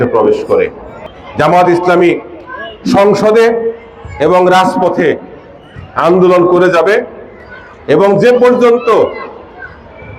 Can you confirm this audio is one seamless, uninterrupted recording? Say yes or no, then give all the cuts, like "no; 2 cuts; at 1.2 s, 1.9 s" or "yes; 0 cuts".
no; 1 cut; at 1.2 s